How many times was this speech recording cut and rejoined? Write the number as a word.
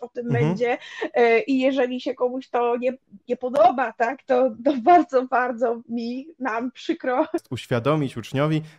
one